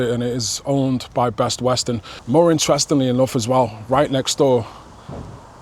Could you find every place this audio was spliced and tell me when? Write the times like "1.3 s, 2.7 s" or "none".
2.1 s